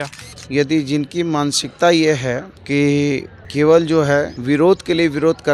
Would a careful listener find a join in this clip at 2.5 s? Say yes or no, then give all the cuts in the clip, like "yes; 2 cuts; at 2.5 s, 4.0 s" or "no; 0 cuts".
yes; 3 cuts; at 2.5 s, 3.4 s, 4.4 s